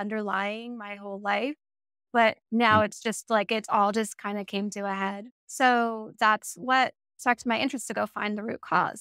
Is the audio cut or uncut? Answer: cut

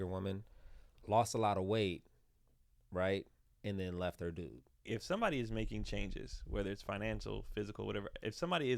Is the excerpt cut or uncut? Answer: cut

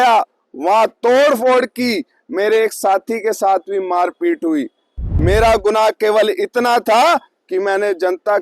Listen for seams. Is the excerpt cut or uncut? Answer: cut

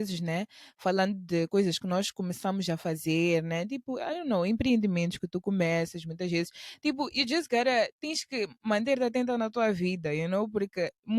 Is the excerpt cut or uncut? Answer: uncut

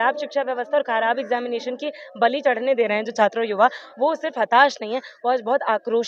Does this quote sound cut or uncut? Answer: uncut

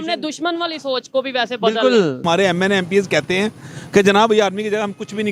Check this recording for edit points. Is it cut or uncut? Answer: cut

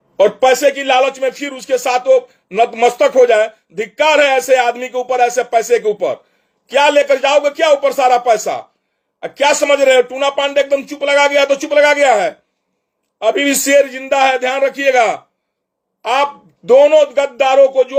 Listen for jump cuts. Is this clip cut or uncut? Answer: uncut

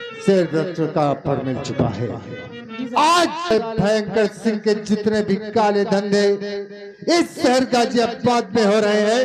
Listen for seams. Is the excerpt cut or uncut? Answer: cut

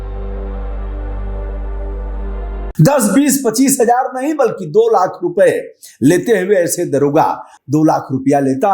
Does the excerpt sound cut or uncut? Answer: cut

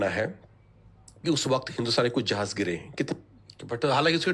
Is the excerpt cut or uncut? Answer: cut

